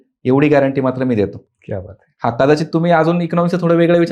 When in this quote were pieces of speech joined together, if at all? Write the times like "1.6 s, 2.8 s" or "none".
none

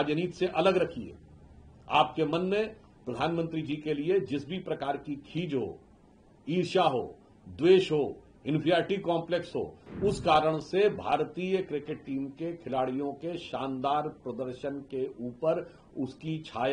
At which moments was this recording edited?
none

